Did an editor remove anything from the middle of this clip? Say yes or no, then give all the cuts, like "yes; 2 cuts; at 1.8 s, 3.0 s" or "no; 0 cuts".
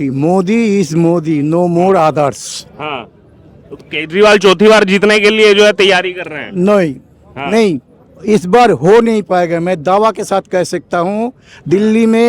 no; 0 cuts